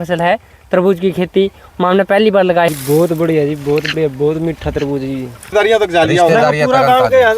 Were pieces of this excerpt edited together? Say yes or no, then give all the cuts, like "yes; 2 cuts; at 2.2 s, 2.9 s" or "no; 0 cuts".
yes; 2 cuts; at 2.7 s, 5.5 s